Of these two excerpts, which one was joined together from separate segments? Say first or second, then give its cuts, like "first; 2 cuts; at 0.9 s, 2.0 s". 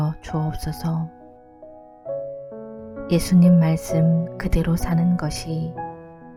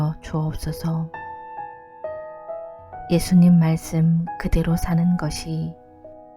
second; 2 cuts; at 1.1 s, 3.0 s